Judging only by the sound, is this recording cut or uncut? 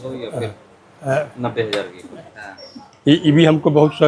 cut